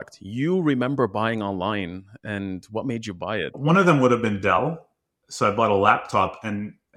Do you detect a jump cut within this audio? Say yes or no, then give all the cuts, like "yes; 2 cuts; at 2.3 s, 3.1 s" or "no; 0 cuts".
yes; 1 cut; at 3.6 s